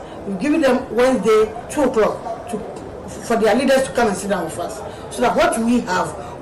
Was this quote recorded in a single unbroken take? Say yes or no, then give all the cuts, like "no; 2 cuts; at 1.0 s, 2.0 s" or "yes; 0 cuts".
no; 1 cut; at 1.6 s